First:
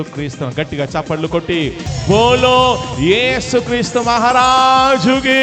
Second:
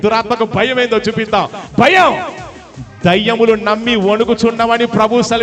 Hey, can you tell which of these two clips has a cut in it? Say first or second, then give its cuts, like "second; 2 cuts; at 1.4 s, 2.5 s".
first; 1 cut; at 1.9 s